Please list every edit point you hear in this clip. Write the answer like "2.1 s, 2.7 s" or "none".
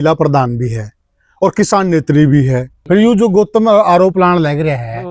2.7 s